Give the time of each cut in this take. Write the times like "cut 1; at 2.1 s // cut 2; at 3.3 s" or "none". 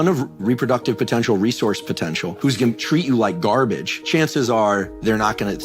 cut 1; at 2.4 s // cut 2; at 3.9 s